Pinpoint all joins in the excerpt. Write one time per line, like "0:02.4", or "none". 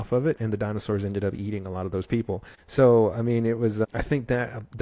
0:02.5
0:03.9